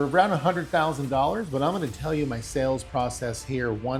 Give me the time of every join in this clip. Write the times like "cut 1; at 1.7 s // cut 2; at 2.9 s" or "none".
none